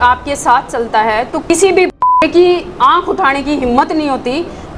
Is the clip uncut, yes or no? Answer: no